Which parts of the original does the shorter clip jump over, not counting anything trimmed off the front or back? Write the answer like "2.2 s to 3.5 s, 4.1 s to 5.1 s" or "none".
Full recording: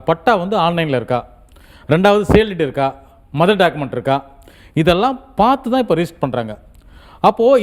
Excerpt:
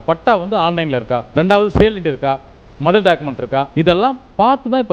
1.3 s to 1.8 s, 4.2 s to 4.7 s